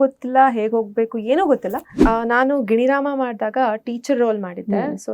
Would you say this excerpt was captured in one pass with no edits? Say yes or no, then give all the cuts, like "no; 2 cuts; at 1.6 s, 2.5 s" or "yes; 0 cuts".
no; 1 cut; at 2.0 s